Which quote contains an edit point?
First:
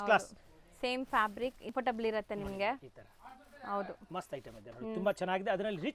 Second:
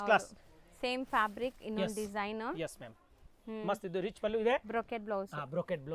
first; 1 cut; at 1.7 s

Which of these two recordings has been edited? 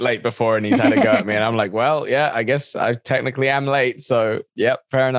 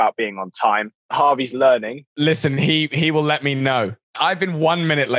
second; 3 cuts; at 1.0 s, 1.9 s, 4.1 s

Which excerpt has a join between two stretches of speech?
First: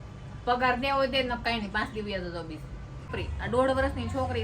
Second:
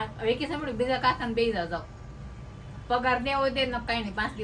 first; 1 cut; at 3.1 s

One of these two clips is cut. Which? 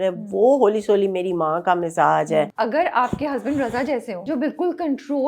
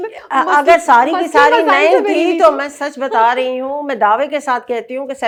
first; 2 cuts; at 2.5 s, 4.2 s

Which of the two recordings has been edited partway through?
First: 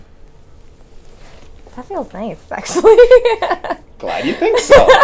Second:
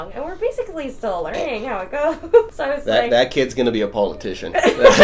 second; 1 cut; at 2.6 s

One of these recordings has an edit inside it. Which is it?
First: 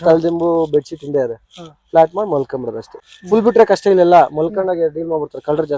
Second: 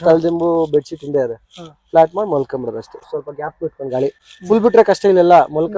first; 1 cut; at 3.1 s

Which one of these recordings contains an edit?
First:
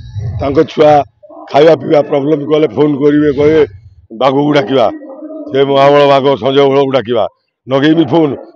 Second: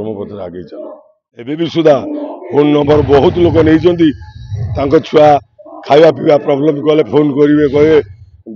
second; 1 cut; at 1.6 s

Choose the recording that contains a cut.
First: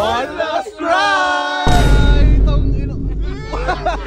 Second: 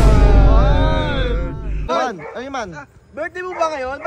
second; 1 cut; at 1.9 s

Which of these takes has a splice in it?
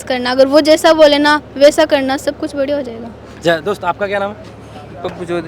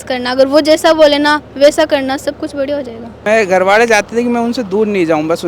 second; 1 cut; at 3.2 s

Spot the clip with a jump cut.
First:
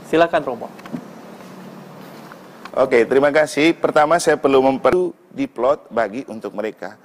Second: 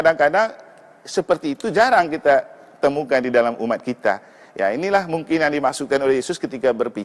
first; 1 cut; at 4.9 s

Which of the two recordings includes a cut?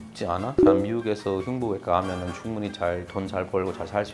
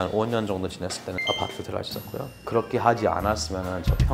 second; 1 cut; at 2.4 s

